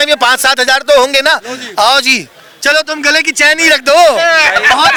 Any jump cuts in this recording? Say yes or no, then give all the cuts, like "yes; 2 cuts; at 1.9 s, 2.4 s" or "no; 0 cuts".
no; 0 cuts